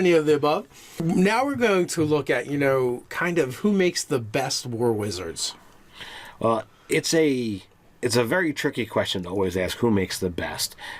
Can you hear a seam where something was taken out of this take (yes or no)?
yes